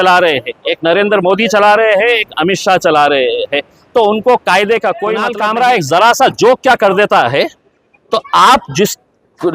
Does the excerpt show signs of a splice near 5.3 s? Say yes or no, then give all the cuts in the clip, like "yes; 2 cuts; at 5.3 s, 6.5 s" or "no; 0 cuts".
yes; 1 cut; at 5.3 s